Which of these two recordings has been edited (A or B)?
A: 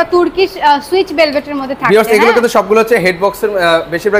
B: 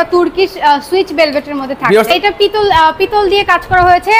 B